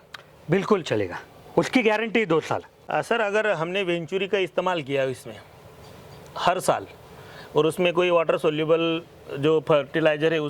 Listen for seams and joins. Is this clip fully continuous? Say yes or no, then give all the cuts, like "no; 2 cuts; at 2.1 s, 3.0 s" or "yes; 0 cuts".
no; 1 cut; at 2.8 s